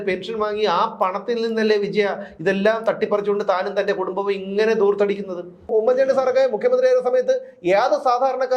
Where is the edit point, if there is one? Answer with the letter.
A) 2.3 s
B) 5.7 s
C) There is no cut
B